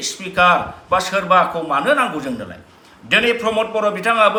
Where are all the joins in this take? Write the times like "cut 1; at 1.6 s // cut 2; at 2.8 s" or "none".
none